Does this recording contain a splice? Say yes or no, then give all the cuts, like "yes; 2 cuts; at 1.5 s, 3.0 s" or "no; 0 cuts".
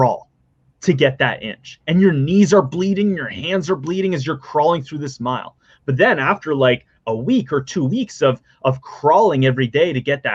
no; 0 cuts